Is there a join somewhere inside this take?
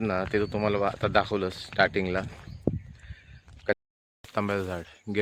yes; 1 cut; at 3.8 s

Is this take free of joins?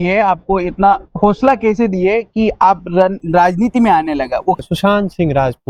no; 1 cut; at 4.6 s

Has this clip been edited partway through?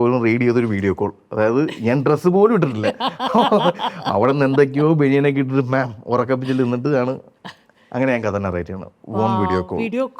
no; 0 cuts

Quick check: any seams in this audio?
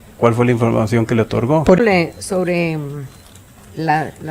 yes; 1 cut; at 1.8 s

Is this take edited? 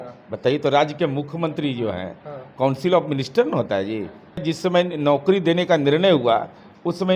yes; 1 cut; at 4.4 s

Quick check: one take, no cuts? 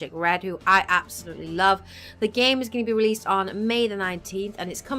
no; 1 cut; at 1.7 s

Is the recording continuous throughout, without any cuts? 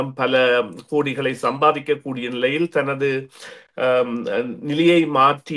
yes; 0 cuts

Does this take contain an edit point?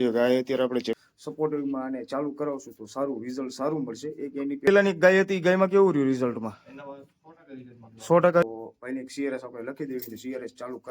yes; 3 cuts; at 1.0 s, 4.6 s, 8.4 s

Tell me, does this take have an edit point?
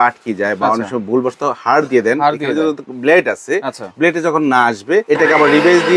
yes; 1 cut; at 5.0 s

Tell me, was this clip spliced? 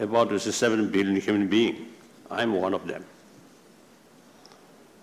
no; 0 cuts

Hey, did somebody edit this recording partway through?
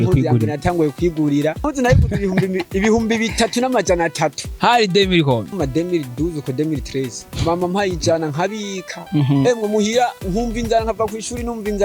yes; 3 cuts; at 1.7 s, 5.5 s, 7.3 s

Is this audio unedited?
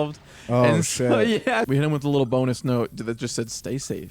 no; 1 cut; at 1.7 s

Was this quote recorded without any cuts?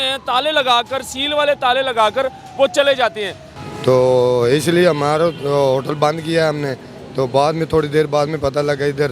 no; 1 cut; at 3.4 s

